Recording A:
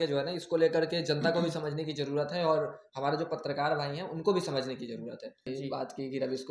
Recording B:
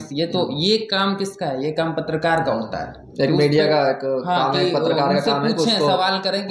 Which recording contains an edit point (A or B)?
A